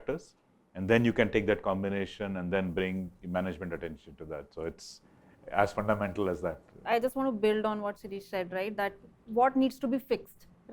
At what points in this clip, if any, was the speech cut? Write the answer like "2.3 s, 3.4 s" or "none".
none